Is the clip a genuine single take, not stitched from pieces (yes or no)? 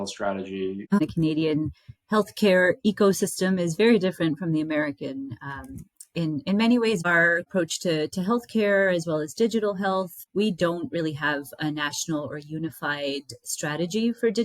no